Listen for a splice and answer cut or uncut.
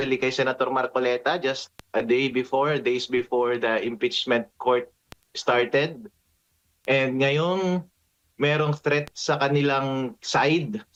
uncut